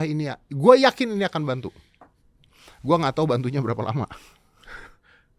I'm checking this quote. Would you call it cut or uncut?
uncut